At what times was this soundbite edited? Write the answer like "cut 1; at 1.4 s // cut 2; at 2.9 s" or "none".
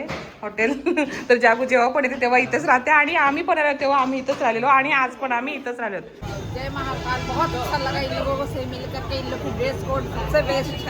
cut 1; at 6.2 s

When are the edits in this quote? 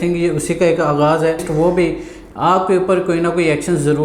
cut 1; at 1.5 s

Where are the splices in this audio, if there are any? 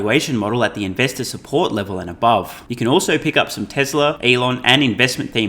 cut 1; at 2.6 s // cut 2; at 4.2 s

